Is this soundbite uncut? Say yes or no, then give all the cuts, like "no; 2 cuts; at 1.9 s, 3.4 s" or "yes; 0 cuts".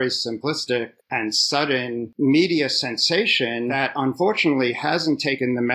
no; 2 cuts; at 2.1 s, 3.7 s